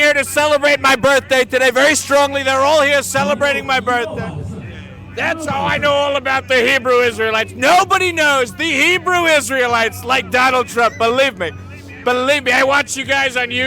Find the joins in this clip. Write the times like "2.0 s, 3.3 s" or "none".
3.0 s, 10.2 s